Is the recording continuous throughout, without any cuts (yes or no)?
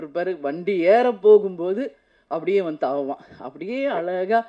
yes